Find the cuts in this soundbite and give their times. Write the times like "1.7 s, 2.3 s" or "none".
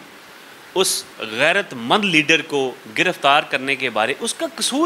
none